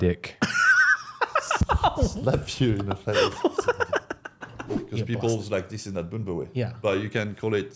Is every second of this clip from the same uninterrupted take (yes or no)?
no